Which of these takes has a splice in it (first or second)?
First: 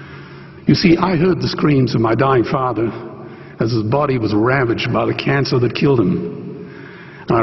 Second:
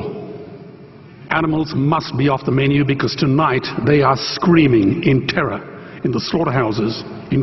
first